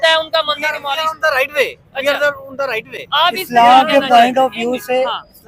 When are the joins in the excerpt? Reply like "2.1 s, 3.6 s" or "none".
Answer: none